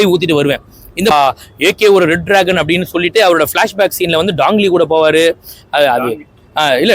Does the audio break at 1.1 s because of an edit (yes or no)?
yes